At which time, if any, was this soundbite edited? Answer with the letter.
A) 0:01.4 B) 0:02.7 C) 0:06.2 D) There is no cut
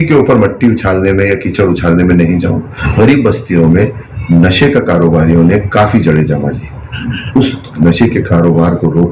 B